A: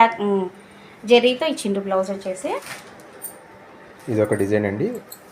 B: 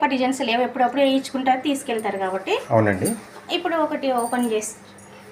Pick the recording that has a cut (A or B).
A